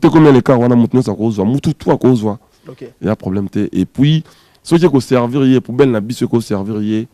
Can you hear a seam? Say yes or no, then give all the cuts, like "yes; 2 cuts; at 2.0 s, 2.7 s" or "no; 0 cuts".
no; 0 cuts